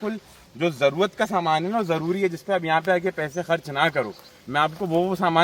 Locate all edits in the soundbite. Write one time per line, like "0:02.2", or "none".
none